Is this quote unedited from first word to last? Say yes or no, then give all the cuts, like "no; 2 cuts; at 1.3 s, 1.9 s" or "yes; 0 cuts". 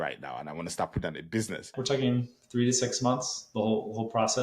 no; 1 cut; at 1.7 s